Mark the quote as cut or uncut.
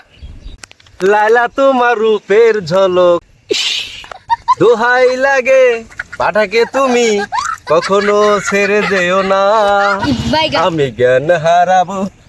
uncut